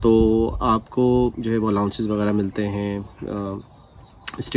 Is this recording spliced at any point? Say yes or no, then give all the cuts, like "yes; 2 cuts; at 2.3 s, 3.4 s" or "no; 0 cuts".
no; 0 cuts